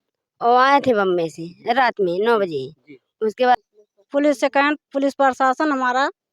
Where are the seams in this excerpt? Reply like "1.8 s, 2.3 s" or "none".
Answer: 3.5 s